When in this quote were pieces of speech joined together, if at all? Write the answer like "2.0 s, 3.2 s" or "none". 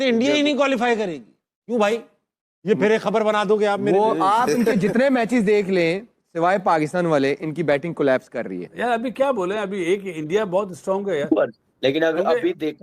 8.6 s, 11.6 s